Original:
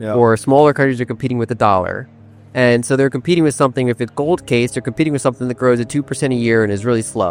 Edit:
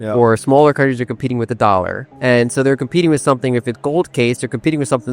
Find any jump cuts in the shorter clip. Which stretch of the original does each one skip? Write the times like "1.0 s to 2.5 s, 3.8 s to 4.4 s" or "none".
2.0 s to 2.4 s

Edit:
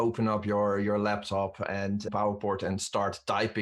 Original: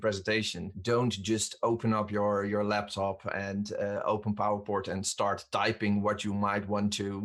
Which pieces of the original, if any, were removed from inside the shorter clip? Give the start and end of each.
3.8 s to 4.4 s

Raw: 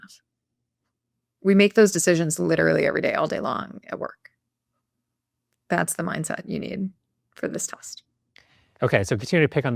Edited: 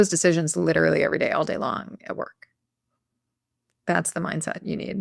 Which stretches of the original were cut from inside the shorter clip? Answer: none

